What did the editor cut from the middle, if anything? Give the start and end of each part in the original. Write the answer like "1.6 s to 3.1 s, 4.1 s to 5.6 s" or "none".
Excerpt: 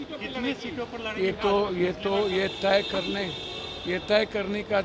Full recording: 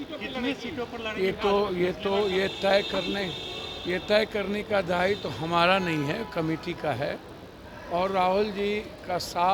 none